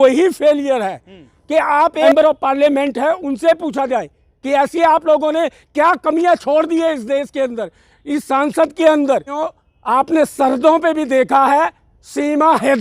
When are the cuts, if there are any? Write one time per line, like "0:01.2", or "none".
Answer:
0:02.1
0:09.9